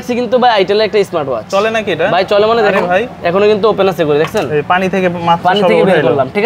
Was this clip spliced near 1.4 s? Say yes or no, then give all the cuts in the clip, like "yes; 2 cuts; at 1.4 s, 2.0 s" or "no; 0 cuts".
no; 0 cuts